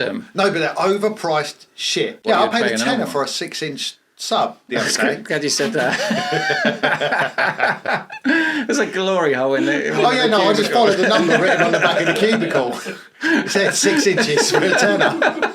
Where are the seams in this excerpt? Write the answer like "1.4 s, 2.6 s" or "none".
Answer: 2.2 s